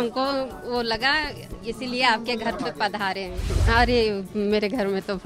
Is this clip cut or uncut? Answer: cut